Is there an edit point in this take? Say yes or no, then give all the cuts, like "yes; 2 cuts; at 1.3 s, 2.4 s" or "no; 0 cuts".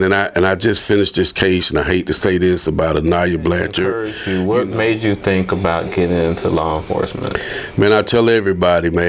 yes; 1 cut; at 4.1 s